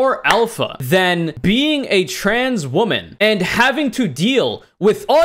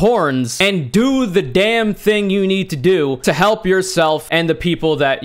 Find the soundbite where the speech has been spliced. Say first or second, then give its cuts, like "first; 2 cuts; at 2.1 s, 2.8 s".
second; 2 cuts; at 3.2 s, 4.2 s